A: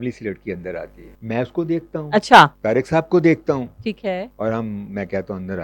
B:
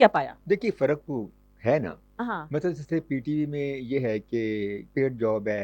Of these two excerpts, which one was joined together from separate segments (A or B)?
A